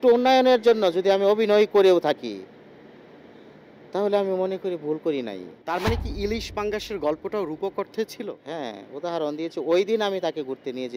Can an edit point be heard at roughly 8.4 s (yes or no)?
yes